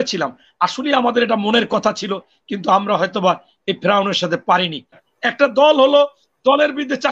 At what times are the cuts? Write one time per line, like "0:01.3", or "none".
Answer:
0:05.0